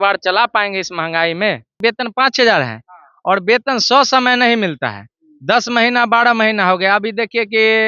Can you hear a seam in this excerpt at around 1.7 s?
yes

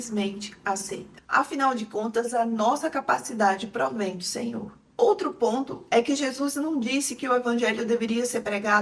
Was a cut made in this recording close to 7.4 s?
no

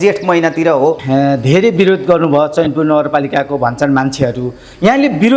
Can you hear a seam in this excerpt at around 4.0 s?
no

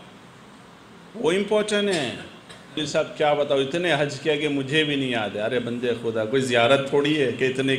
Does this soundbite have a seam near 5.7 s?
no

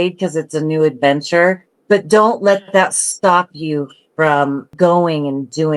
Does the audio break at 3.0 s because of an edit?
no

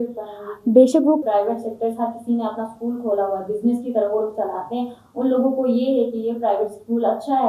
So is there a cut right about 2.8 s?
no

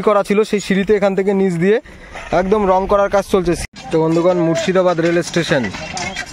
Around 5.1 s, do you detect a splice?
no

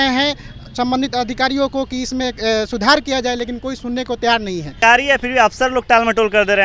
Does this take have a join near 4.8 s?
yes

